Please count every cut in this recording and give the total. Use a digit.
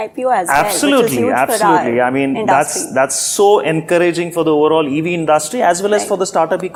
0